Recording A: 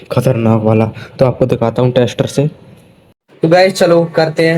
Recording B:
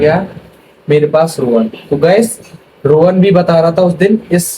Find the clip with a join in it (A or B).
A